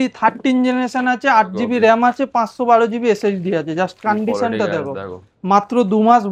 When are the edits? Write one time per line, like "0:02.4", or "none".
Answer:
none